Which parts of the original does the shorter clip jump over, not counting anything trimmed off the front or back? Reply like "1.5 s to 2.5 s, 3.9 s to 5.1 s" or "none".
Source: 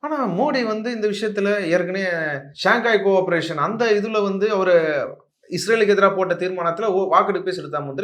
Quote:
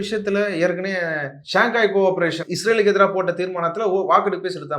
3.5 s to 5.4 s